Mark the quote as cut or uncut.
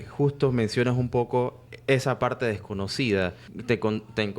cut